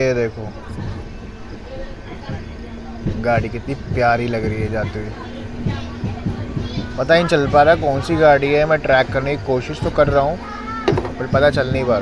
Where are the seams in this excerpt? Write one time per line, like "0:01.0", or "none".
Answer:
none